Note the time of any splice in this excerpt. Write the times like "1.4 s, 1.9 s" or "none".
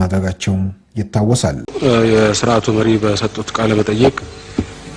1.7 s